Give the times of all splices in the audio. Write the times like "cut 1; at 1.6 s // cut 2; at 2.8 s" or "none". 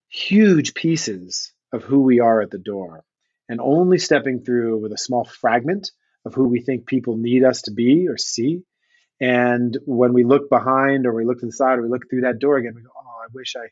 none